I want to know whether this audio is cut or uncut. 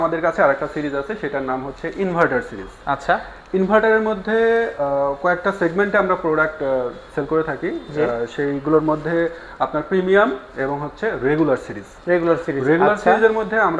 uncut